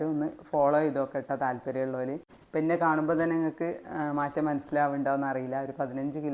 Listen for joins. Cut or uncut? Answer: cut